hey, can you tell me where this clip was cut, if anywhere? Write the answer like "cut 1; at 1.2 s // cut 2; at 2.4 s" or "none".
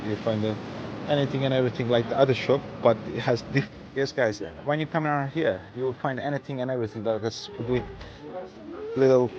cut 1; at 3.7 s // cut 2; at 7.6 s